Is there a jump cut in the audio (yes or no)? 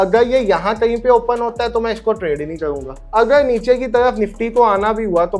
yes